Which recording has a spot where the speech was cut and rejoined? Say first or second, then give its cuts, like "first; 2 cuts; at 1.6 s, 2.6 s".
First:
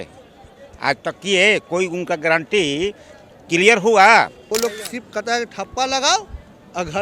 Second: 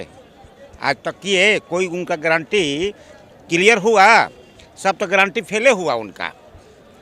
first; 1 cut; at 4.4 s